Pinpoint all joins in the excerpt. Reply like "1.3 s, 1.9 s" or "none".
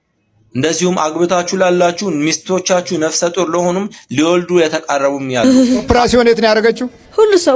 5.4 s